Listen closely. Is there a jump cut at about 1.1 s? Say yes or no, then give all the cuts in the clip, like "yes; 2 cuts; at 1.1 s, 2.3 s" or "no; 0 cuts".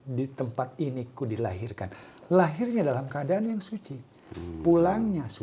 no; 0 cuts